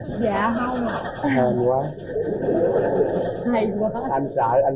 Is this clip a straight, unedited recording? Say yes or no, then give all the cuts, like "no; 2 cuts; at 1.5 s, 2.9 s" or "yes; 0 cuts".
yes; 0 cuts